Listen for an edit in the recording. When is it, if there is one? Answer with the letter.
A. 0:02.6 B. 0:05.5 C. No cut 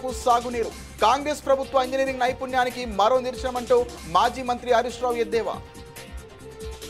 B